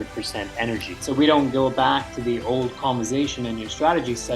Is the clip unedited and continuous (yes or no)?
no